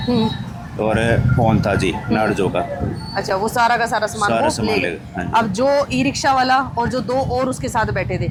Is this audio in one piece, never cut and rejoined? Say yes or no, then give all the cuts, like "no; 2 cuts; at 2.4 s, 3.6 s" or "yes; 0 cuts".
yes; 0 cuts